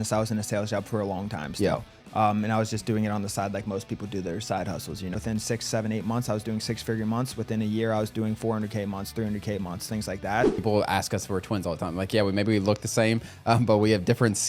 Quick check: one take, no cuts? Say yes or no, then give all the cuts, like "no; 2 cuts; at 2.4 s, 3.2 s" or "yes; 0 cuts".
no; 2 cuts; at 5.2 s, 10.6 s